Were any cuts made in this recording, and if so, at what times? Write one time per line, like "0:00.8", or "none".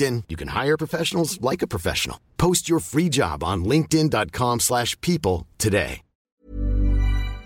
0:06.3